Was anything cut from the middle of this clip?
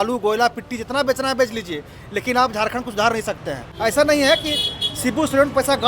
yes; 1 cut; at 3.7 s

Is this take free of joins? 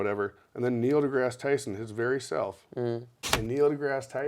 no; 1 cut; at 3.2 s

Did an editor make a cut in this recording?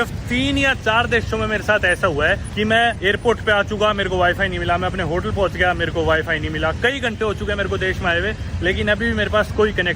yes; 1 cut; at 2.7 s

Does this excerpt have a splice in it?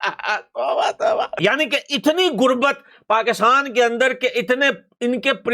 yes; 1 cut; at 1.3 s

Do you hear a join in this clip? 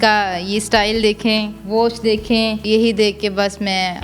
yes; 1 cut; at 2.6 s

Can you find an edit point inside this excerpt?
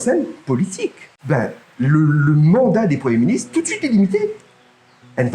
yes; 1 cut; at 1.1 s

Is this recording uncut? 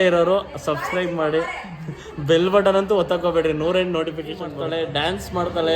no; 1 cut; at 4.6 s

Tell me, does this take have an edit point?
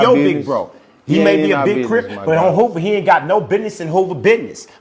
no; 0 cuts

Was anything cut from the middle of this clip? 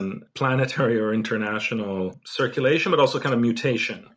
no; 0 cuts

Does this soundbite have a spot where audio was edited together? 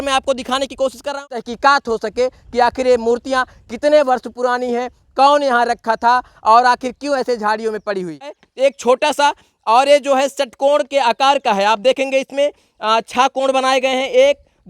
yes; 2 cuts; at 1.3 s, 8.4 s

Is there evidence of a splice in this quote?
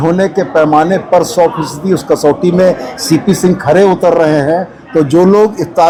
no; 0 cuts

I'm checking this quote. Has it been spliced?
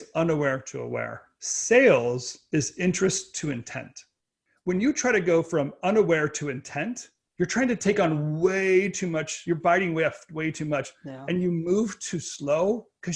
no; 0 cuts

